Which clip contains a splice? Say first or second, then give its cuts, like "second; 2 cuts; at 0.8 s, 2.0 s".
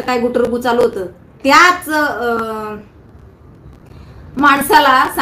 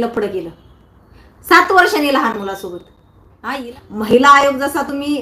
second; 1 cut; at 3.3 s